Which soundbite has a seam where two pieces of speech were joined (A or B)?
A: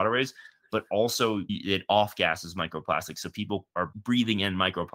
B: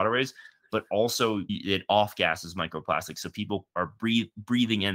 A